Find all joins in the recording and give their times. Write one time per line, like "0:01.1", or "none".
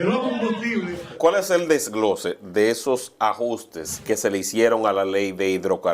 0:01.2
0:04.0